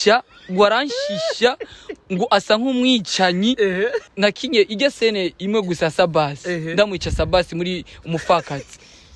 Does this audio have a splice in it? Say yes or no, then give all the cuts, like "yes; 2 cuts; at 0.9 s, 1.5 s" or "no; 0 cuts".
yes; 1 cut; at 4.0 s